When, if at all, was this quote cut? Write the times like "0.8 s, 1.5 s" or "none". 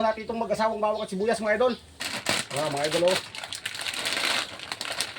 1.6 s